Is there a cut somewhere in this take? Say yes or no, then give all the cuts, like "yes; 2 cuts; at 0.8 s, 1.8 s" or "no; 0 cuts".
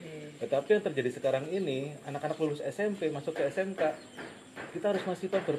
no; 0 cuts